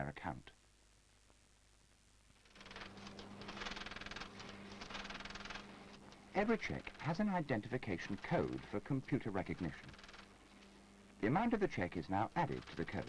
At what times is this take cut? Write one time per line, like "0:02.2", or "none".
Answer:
0:03.7